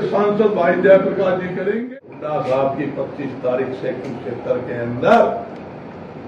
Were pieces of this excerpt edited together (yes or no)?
yes